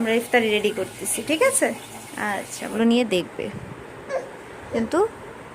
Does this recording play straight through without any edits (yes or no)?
no